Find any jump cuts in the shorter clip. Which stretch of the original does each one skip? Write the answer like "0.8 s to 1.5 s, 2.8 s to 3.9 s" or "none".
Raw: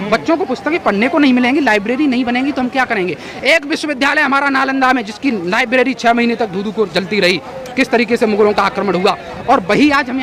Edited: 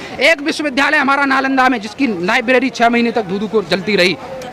none

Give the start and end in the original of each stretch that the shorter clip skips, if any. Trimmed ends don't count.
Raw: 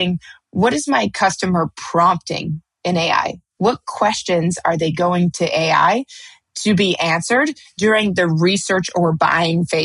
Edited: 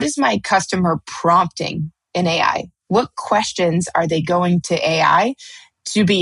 none

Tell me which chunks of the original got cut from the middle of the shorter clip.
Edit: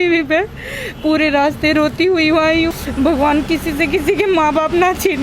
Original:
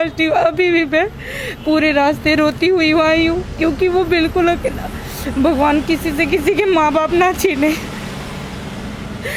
3.4 s to 5.2 s

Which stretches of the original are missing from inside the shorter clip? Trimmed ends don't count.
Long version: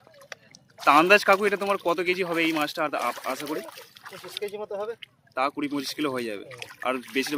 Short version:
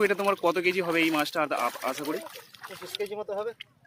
none

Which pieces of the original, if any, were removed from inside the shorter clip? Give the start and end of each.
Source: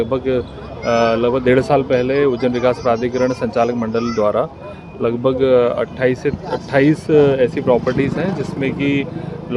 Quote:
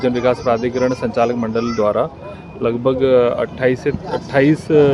none

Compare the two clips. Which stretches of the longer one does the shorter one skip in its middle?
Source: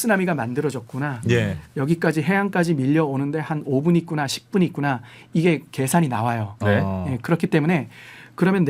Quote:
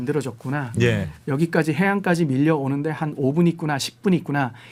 none

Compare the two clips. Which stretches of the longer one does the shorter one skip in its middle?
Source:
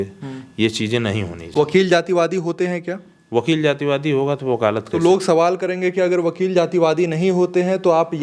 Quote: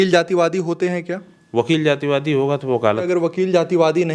4.8 s to 6.0 s

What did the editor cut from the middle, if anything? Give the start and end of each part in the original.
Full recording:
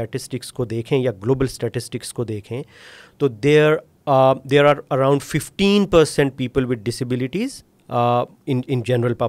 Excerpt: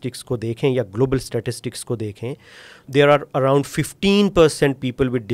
3.1 s to 4.4 s

